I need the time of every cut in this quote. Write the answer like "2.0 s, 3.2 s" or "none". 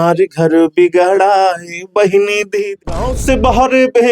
2.8 s